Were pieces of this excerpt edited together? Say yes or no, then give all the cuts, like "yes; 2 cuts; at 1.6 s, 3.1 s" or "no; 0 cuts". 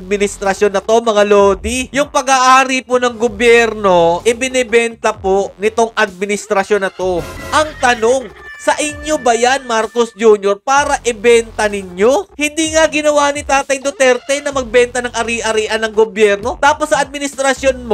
yes; 2 cuts; at 7.4 s, 12.3 s